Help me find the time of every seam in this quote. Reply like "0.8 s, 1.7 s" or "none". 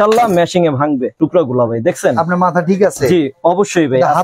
1.1 s